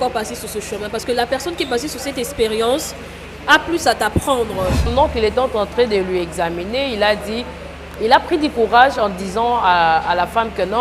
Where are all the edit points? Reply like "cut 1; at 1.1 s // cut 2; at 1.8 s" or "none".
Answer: cut 1; at 4.9 s